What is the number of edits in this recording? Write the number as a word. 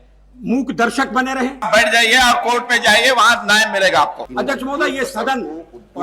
two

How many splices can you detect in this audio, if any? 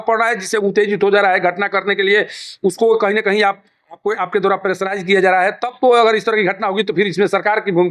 zero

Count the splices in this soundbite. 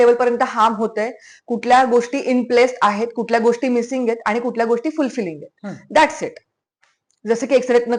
zero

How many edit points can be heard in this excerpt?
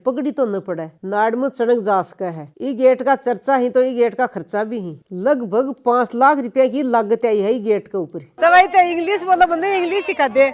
three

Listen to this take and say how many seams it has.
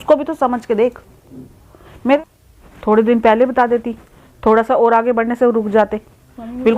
one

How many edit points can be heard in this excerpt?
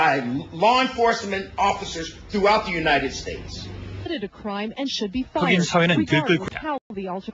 one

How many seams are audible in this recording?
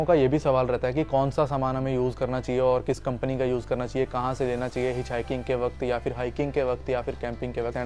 zero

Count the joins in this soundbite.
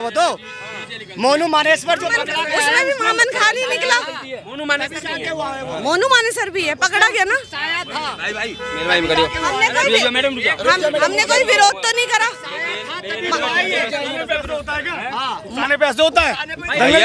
zero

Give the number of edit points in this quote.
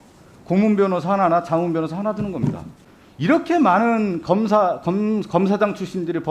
one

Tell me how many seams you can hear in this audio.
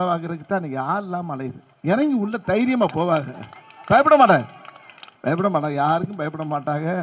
zero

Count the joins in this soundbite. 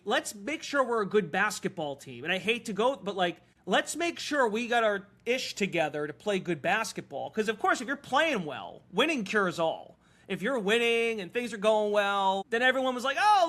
two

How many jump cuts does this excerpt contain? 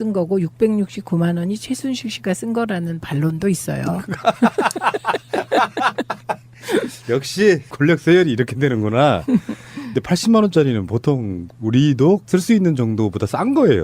one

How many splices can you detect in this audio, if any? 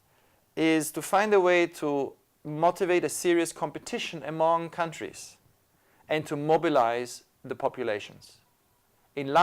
one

